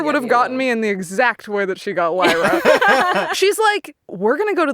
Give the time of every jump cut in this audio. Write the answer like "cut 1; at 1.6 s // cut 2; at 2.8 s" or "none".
cut 1; at 3.3 s